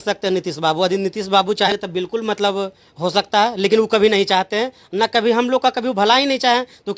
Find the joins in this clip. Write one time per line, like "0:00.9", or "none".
0:01.7

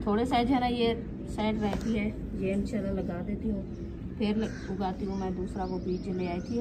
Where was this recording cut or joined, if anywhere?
none

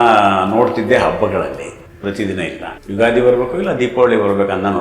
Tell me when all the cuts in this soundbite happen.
0:01.8
0:02.7

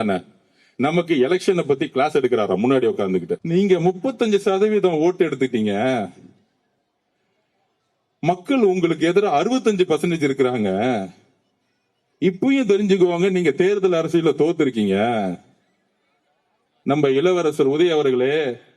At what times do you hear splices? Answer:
0:03.4

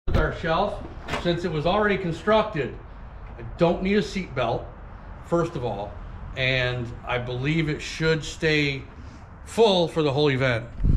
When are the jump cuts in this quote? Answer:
none

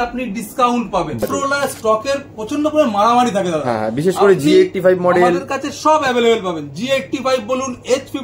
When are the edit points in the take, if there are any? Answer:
0:01.2

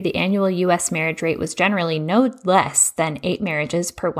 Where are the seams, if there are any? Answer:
none

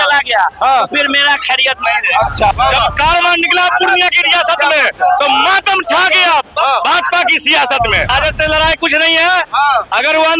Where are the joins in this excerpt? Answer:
0:02.5
0:08.1

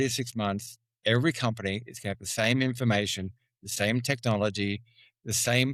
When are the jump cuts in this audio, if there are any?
none

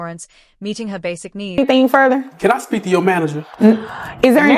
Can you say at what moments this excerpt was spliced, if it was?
none

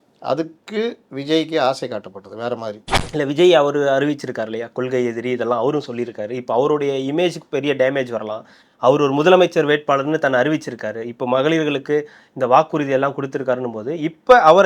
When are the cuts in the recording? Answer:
0:02.9

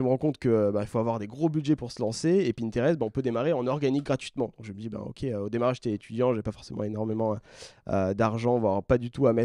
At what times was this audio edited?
none

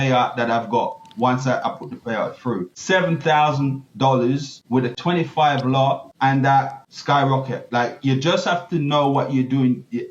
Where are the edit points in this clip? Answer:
0:02.7
0:05.0
0:06.1
0:06.8

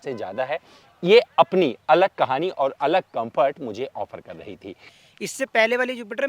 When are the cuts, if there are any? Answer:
0:04.9

